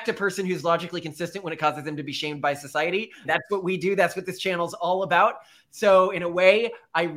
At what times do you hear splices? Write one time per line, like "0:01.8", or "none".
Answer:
none